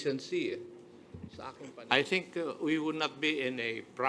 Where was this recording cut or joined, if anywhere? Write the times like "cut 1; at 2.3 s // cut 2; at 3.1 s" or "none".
cut 1; at 1.4 s